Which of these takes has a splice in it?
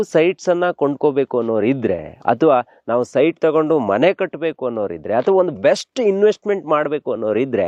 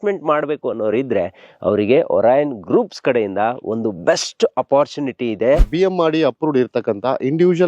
second; 1 cut; at 5.7 s

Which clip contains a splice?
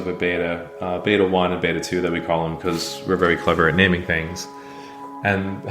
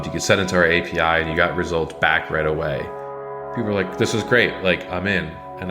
second; 1 cut; at 3.4 s

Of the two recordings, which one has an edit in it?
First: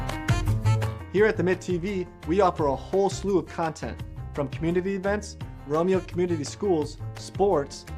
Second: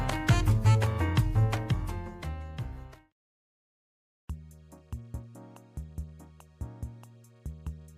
first; 1 cut; at 0.9 s

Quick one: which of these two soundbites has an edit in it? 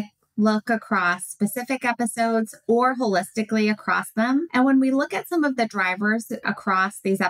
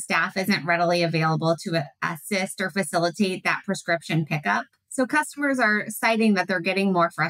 first; 1 cut; at 4.5 s

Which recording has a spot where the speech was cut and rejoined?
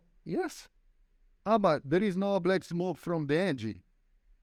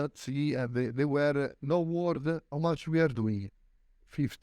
second; 2 cuts; at 1.6 s, 2.5 s

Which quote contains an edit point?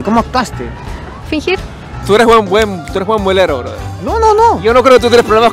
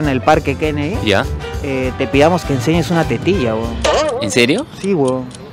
first; 1 cut; at 1.9 s

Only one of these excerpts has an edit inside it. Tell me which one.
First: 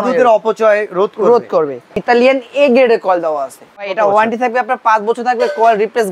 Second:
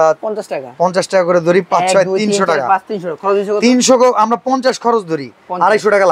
first; 2 cuts; at 2.0 s, 3.9 s

